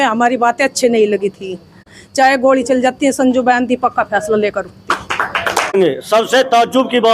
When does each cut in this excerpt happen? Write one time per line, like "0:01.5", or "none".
0:01.9
0:05.7